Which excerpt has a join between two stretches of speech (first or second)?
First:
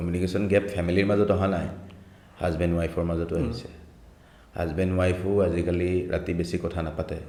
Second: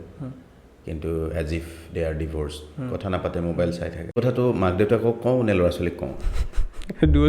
second